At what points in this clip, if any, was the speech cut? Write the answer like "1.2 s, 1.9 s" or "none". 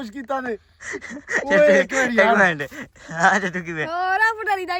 none